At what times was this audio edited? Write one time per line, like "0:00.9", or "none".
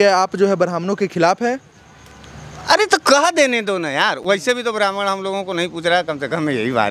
none